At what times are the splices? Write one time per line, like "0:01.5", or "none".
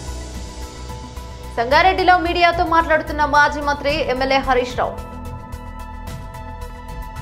0:01.1